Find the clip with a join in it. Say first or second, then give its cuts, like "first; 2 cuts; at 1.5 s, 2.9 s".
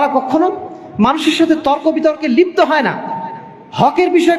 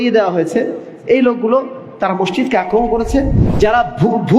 second; 1 cut; at 3.4 s